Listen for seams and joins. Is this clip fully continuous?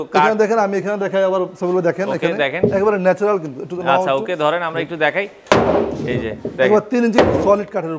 yes; 0 cuts

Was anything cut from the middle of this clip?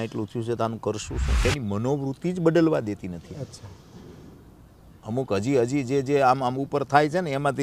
yes; 1 cut; at 1.4 s

